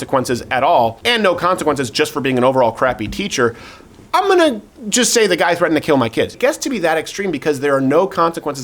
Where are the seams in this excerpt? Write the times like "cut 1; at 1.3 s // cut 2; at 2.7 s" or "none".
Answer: cut 1; at 1.0 s // cut 2; at 6.3 s